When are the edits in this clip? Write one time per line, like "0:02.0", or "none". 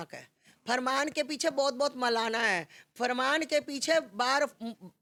none